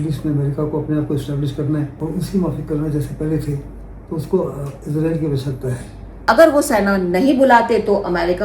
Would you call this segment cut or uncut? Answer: cut